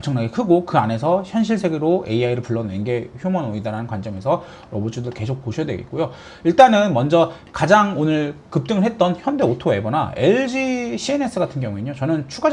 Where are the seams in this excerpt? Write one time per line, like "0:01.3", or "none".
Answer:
none